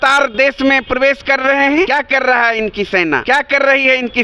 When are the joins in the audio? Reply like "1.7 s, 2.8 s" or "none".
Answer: 1.9 s, 3.2 s